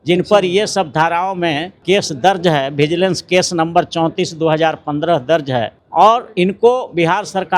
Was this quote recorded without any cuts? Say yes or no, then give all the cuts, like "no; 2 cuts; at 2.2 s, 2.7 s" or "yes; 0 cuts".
no; 2 cuts; at 1.8 s, 5.8 s